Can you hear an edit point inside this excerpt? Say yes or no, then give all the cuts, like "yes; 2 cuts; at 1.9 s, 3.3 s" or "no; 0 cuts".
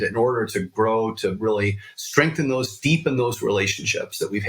no; 0 cuts